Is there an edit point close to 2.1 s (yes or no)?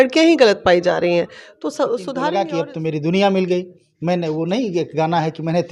yes